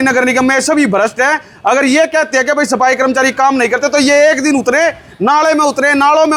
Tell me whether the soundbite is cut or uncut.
uncut